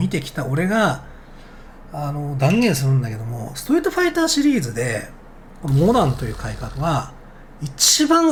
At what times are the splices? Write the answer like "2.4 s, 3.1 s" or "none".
none